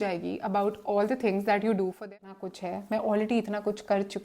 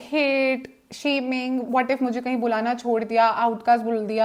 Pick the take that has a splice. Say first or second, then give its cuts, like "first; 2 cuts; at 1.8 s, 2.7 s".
first; 1 cut; at 2.1 s